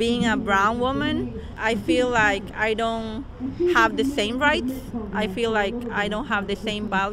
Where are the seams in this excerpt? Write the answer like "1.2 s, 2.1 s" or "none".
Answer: 1.6 s